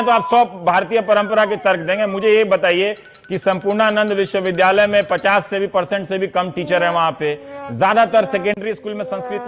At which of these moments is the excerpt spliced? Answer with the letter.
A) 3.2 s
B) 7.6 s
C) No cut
C